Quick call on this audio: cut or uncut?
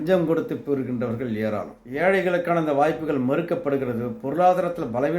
cut